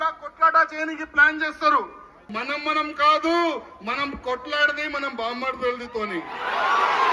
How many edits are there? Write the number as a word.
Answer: one